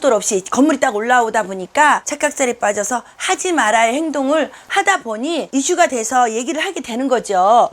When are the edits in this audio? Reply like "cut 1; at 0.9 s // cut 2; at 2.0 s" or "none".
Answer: cut 1; at 2.1 s